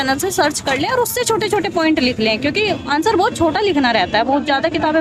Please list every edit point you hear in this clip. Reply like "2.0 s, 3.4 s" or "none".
none